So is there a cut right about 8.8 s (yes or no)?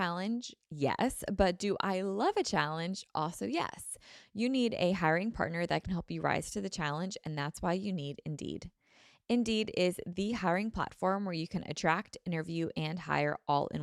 no